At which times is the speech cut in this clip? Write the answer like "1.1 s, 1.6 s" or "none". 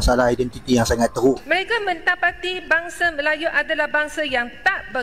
1.4 s